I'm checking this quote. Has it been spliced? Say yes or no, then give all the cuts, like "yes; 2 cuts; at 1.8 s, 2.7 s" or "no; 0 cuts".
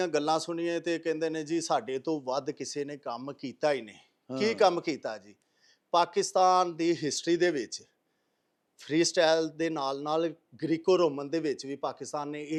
no; 0 cuts